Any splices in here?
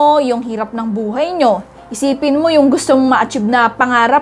no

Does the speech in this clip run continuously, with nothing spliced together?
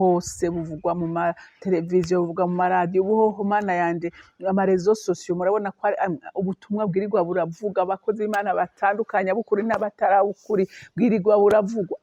yes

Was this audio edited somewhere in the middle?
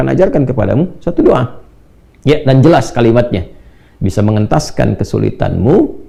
no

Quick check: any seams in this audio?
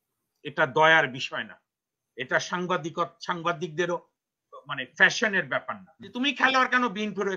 yes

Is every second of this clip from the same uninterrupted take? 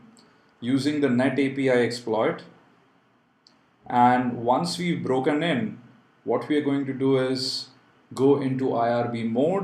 no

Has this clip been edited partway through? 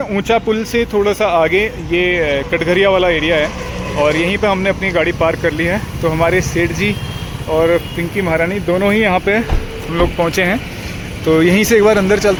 no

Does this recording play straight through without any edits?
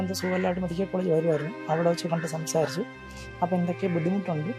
yes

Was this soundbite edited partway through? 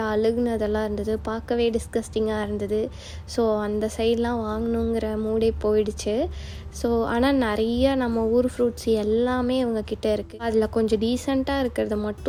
no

